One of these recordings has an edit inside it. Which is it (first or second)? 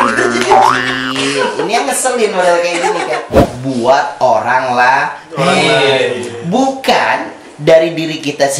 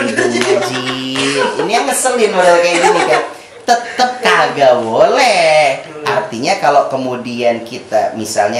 first